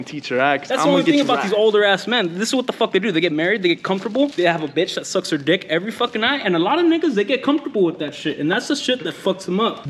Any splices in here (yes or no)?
no